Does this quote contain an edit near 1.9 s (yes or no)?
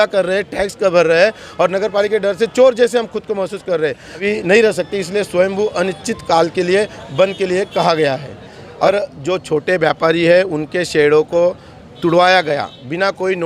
no